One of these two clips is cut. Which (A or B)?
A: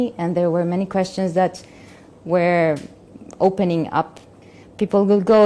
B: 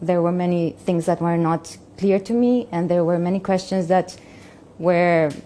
A